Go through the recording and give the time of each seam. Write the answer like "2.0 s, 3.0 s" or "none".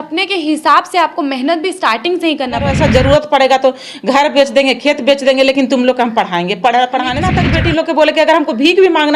2.7 s, 7.4 s